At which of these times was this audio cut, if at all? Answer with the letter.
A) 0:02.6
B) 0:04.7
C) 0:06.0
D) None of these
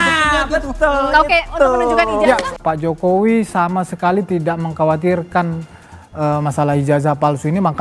A